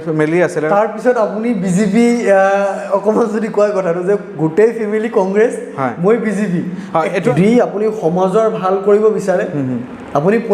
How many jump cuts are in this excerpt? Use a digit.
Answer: 1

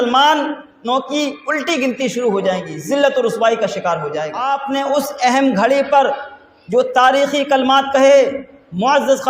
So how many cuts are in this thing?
1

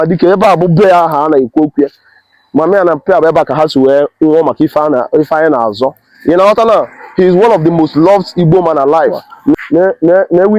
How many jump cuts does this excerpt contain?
1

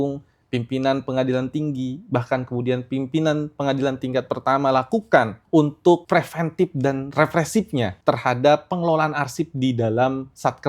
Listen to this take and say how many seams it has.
3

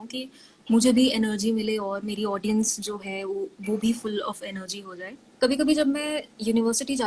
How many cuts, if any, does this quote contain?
1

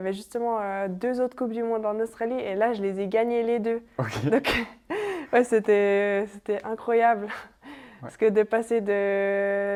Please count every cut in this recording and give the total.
0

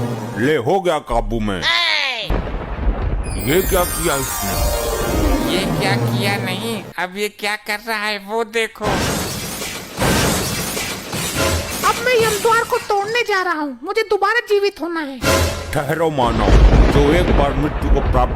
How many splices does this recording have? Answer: 2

